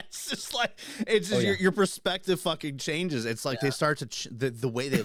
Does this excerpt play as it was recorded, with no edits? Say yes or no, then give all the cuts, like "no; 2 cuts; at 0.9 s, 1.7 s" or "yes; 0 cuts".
yes; 0 cuts